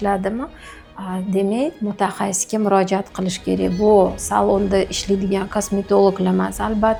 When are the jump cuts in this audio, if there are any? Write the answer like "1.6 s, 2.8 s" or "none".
none